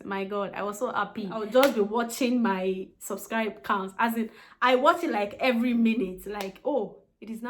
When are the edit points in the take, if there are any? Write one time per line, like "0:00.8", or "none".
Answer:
0:01.4